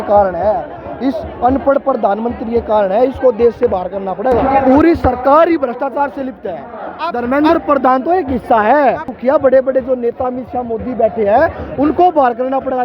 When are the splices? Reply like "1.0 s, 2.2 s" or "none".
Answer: 4.4 s, 9.1 s